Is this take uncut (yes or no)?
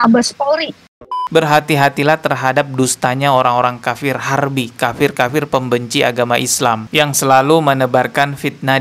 no